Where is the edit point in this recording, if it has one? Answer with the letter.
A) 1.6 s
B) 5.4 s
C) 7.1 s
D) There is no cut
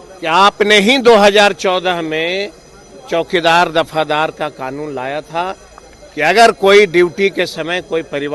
D